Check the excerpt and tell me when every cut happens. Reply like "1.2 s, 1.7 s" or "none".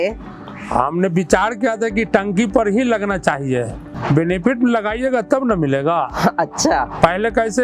3.9 s